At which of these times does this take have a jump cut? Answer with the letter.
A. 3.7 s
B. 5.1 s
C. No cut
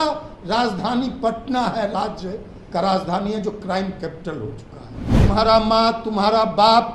B